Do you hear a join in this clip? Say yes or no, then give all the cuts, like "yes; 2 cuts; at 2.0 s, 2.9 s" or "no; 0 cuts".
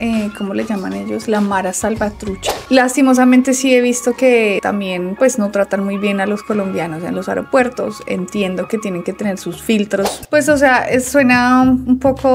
yes; 2 cuts; at 2.6 s, 10.2 s